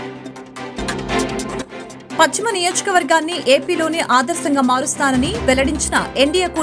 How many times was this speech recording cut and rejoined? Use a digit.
2